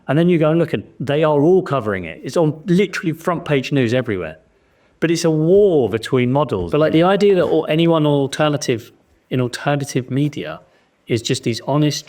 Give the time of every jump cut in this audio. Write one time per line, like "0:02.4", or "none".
0:06.6